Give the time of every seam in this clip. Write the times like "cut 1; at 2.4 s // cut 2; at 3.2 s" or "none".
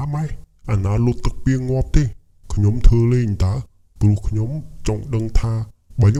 none